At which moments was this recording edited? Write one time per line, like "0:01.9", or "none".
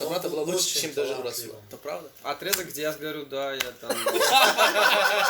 0:02.1